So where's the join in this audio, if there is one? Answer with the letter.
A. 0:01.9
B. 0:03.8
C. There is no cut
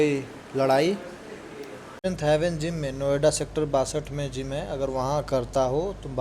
A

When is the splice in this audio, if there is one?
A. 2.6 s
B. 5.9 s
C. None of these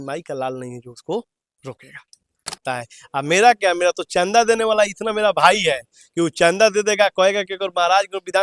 A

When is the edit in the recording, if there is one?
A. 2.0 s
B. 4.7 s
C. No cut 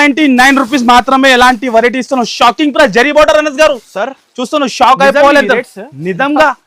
C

